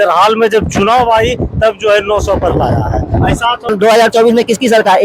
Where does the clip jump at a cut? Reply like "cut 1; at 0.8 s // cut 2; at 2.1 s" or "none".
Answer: cut 1; at 3.7 s